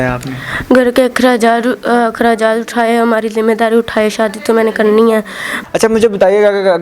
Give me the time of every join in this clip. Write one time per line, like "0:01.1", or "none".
0:05.5